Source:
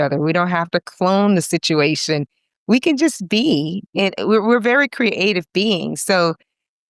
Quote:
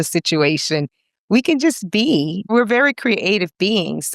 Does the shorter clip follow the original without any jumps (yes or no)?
no